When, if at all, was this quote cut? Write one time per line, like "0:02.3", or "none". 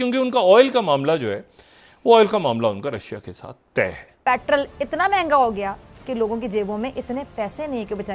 0:04.2